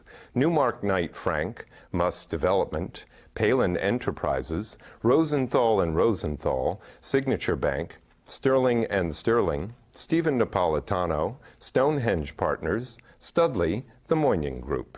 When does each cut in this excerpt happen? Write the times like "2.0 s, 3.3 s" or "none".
13.9 s